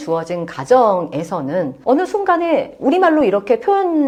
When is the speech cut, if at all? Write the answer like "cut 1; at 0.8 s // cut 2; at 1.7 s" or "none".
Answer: none